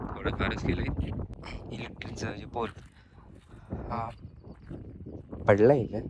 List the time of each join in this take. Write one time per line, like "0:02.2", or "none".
0:01.3